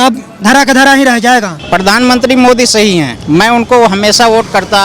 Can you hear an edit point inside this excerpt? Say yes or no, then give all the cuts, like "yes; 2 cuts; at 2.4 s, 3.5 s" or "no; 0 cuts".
yes; 2 cuts; at 1.6 s, 3.1 s